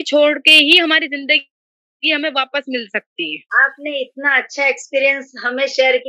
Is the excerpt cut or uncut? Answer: uncut